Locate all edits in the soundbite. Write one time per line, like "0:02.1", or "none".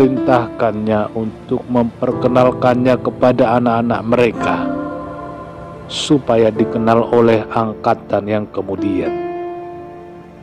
none